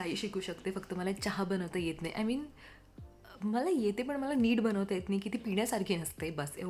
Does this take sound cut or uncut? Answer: uncut